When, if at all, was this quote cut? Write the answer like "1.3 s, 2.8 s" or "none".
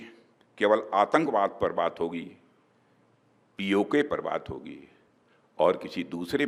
none